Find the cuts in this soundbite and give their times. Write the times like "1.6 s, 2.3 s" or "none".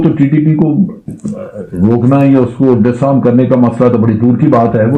none